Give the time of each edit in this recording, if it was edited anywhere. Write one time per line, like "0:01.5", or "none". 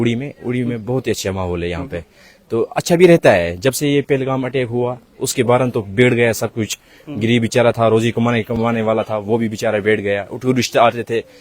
none

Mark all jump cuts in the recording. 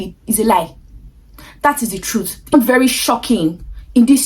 0:02.5

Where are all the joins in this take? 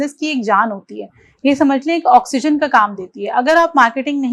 none

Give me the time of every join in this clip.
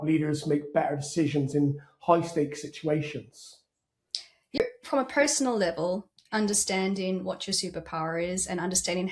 0:04.6

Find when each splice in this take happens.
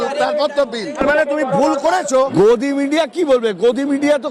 0:01.0
0:02.2

